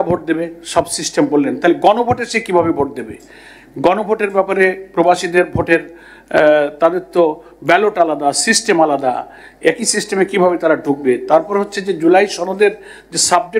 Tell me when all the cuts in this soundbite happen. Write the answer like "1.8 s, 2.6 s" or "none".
none

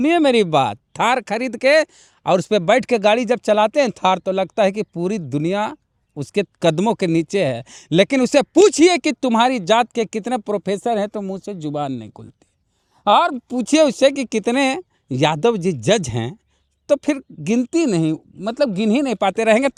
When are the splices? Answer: none

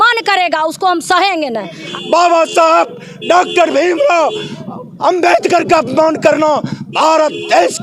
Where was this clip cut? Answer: 1.8 s

